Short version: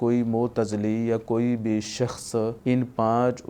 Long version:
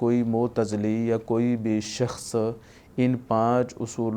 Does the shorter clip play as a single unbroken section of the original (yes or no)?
no